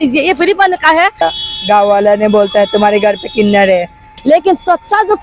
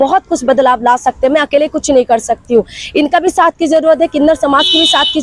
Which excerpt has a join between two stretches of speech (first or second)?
first